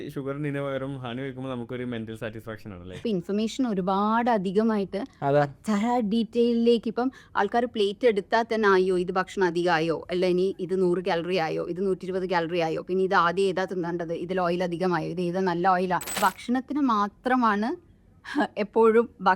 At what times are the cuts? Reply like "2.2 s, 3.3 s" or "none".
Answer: 3.0 s, 16.2 s

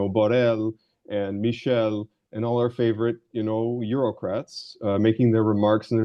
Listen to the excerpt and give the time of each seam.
none

